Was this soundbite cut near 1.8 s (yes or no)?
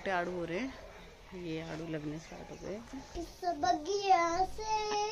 no